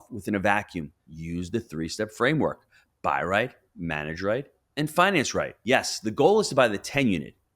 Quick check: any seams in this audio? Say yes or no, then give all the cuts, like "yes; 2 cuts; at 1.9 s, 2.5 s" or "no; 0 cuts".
yes; 2 cuts; at 1.1 s, 5.6 s